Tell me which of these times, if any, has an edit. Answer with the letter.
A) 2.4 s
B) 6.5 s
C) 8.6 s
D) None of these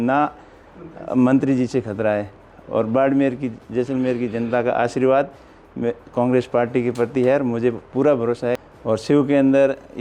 C